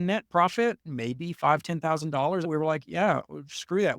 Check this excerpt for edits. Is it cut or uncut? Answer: cut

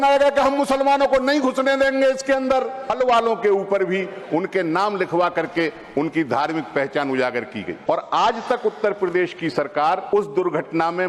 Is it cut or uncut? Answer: cut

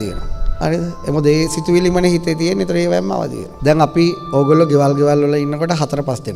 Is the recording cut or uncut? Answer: cut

